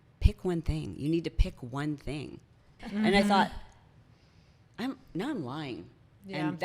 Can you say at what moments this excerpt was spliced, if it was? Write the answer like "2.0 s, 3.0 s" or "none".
2.8 s

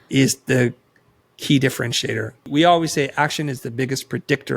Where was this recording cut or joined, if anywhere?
2.5 s

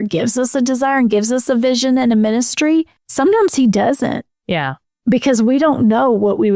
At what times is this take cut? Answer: 3.0 s

